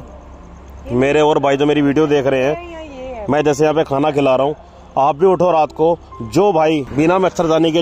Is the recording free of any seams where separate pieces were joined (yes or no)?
yes